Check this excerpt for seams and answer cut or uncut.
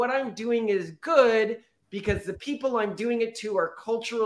uncut